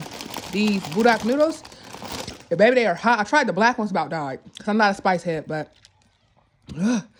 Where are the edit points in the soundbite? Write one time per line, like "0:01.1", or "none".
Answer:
none